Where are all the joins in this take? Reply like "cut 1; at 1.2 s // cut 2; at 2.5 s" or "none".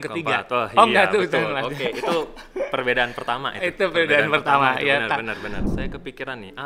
cut 1; at 5.6 s